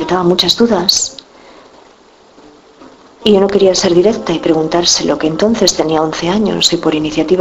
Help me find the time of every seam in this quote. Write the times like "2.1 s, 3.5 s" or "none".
4.7 s

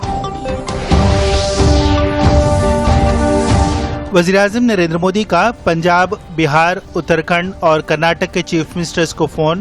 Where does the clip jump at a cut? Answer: 3.0 s

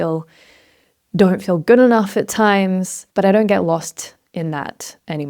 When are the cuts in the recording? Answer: 3.0 s

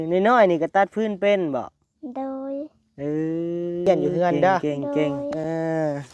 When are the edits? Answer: 3.8 s

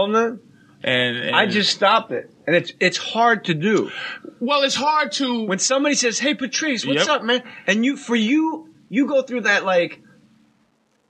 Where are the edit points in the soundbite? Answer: 3.7 s

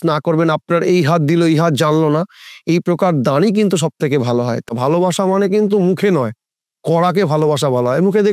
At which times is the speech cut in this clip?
4.7 s

